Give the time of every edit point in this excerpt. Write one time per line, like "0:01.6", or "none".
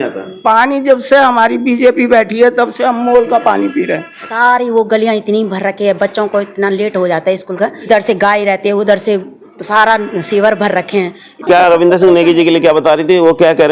0:04.3
0:07.9
0:11.4